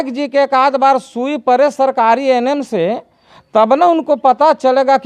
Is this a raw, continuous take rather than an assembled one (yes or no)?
yes